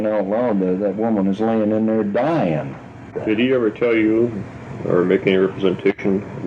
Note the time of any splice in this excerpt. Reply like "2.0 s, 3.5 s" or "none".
3.1 s